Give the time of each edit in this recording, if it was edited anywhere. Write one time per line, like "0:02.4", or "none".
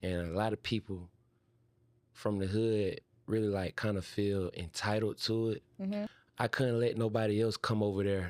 0:06.1